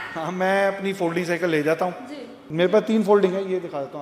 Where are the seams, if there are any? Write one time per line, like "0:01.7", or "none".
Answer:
0:02.4